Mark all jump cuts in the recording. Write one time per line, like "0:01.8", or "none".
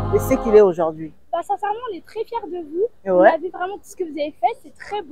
none